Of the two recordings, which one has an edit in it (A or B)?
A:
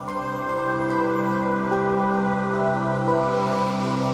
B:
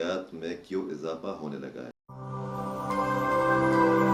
B